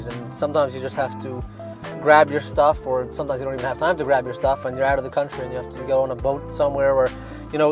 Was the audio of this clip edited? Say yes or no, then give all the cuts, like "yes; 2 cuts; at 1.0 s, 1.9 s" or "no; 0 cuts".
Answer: no; 0 cuts